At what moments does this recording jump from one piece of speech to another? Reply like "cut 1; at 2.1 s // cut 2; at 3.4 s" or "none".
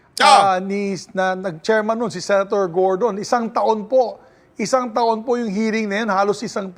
none